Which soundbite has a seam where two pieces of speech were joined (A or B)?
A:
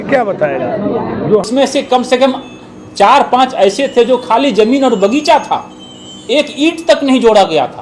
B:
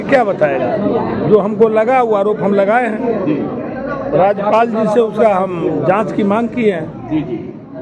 A